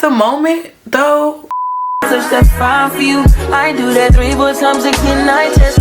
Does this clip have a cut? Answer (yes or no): yes